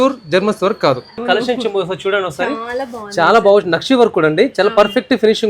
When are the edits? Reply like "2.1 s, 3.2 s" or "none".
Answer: 1.2 s

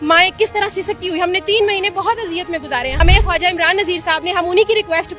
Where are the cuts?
2.9 s

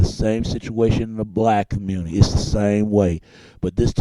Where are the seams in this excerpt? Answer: 2.0 s

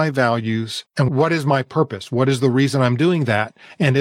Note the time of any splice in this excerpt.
1.1 s

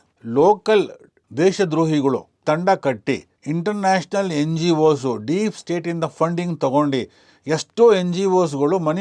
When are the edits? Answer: none

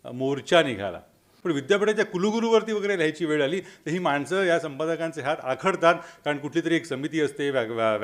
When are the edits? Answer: 1.3 s

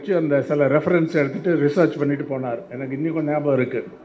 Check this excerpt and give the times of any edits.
none

